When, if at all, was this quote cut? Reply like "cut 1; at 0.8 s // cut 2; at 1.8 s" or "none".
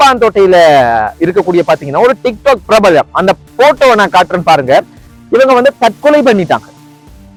none